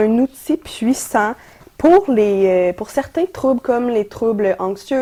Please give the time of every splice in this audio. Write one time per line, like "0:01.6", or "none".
none